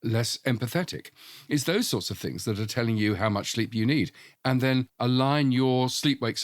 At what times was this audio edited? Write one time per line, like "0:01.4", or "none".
0:04.2

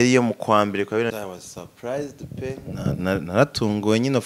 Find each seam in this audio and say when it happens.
0:01.1

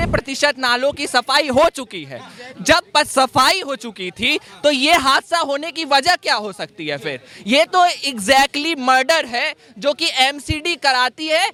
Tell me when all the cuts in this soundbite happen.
none

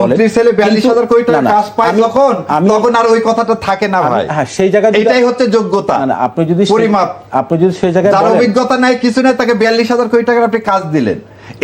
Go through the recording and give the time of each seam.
none

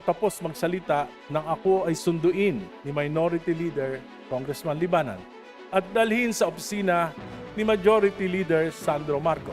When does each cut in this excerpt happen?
0:02.0
0:02.7

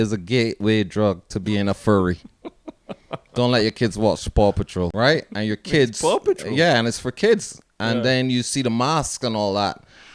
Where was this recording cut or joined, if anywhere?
0:04.9

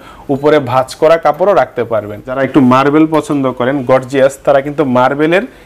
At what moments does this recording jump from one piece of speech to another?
0:02.4

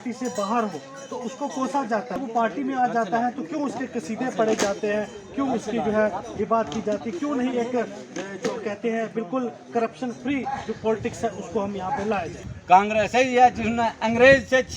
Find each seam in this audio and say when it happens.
0:02.1
0:12.5

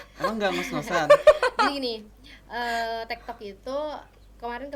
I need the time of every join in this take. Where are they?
none

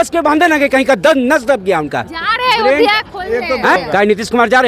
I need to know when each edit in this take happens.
0:03.8

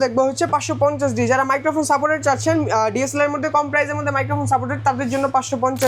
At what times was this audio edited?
none

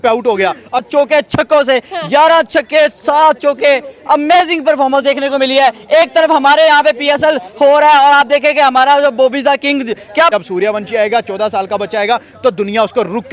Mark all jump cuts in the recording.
0:00.8
0:10.3

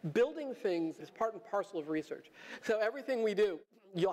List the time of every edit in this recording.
0:01.0

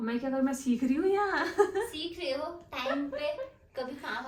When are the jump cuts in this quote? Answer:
none

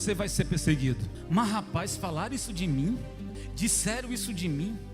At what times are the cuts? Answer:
0:01.1
0:03.4

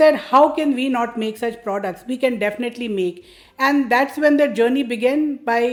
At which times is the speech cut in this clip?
none

